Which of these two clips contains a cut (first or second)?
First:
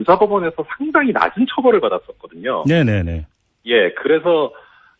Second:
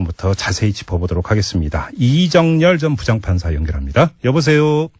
second